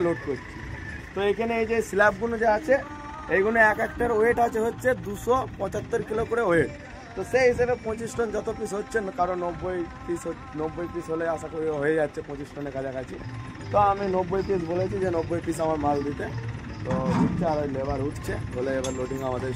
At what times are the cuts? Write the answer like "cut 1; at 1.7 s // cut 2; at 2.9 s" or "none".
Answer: none